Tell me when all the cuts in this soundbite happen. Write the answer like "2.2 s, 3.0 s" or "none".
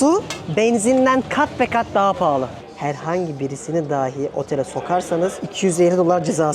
2.5 s, 5.4 s